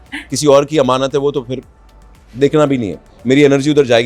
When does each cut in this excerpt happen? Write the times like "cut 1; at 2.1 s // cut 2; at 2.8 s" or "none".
none